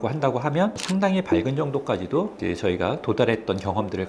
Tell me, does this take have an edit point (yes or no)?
no